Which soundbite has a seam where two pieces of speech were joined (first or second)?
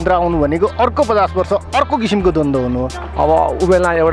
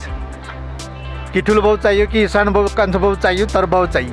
first